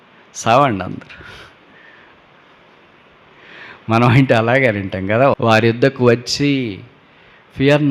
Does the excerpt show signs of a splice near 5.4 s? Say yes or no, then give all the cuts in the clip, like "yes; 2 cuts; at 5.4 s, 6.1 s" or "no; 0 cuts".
yes; 1 cut; at 5.4 s